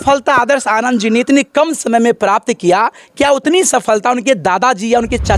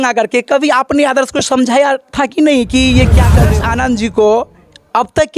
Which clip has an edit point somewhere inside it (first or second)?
second